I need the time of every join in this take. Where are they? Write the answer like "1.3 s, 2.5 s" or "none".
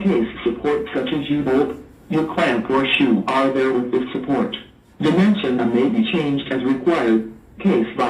none

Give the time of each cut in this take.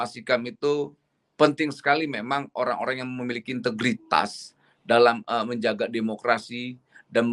none

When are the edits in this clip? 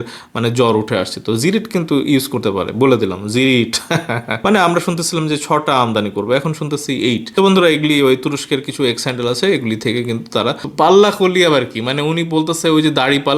4.3 s, 10.6 s

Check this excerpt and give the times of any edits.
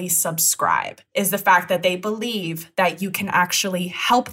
1.0 s

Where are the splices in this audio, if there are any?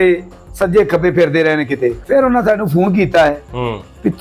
2.0 s

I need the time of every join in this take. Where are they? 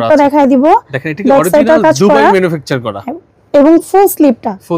none

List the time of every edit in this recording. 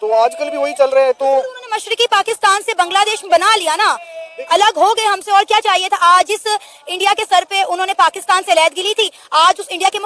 none

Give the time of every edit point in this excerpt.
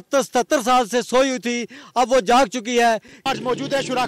3.2 s

